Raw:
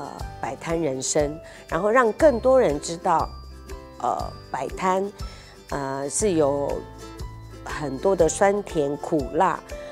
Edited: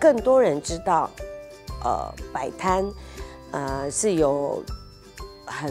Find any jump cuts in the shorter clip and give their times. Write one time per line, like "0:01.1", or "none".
none